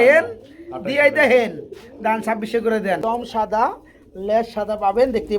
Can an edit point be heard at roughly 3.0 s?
yes; 1 cut; at 3.0 s

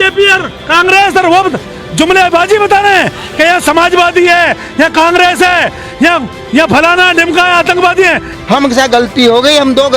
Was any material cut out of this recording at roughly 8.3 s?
yes; 1 cut; at 8.3 s

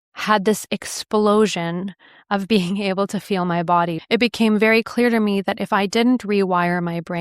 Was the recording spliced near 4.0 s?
yes; 1 cut; at 4.0 s

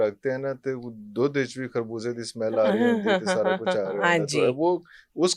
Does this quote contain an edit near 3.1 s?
no; 0 cuts

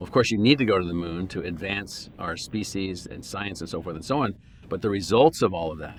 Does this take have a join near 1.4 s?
no; 0 cuts

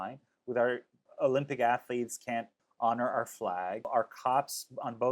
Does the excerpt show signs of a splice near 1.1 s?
yes; 3 cuts; at 1.1 s, 2.6 s, 3.9 s

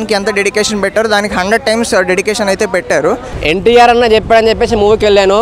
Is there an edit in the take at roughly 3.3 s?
yes; 1 cut; at 3.3 s

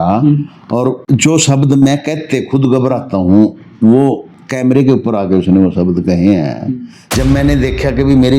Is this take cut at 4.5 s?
no; 2 cuts; at 1.0 s, 7.1 s

